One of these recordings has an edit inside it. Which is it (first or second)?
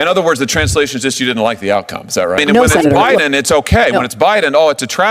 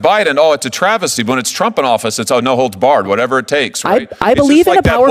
first